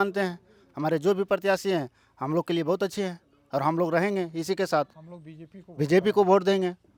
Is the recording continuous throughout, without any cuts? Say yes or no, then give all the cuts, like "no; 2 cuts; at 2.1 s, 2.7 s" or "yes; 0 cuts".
yes; 0 cuts